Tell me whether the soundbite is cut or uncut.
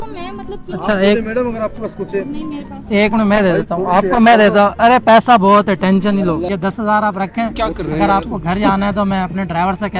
cut